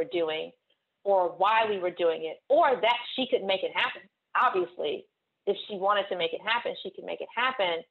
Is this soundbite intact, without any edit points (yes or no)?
yes